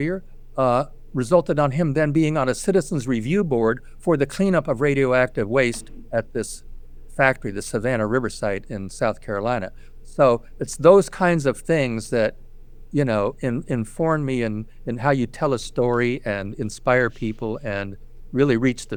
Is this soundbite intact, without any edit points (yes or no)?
yes